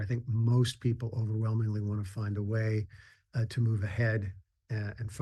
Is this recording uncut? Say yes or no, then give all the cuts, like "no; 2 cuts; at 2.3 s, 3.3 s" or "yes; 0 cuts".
yes; 0 cuts